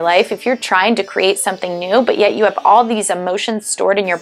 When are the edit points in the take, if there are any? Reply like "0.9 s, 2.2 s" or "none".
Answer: none